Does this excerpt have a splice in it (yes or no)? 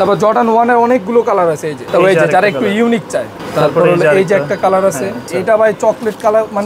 yes